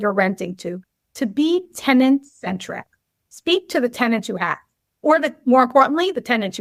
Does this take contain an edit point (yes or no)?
no